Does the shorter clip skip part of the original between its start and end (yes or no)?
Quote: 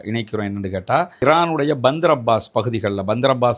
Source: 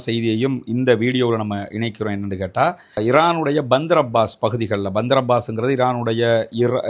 yes